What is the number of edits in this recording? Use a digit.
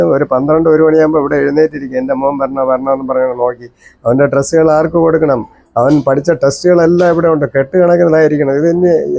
0